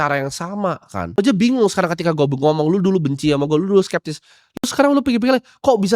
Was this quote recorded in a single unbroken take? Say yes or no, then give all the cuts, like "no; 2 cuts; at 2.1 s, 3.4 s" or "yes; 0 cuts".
no; 1 cut; at 1.2 s